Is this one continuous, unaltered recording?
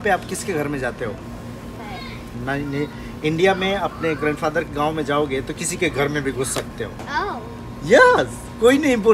no; 2 cuts; at 1.8 s, 7.1 s

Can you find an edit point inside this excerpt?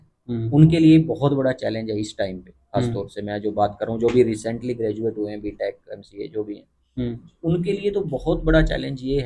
no; 0 cuts

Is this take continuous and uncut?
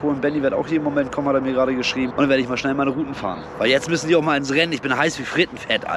yes; 0 cuts

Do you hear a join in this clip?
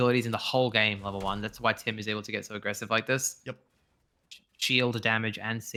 no; 0 cuts

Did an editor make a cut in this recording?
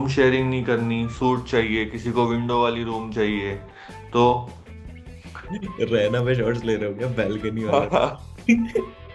no; 0 cuts

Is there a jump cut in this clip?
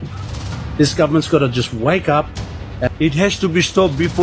yes; 1 cut; at 2.9 s

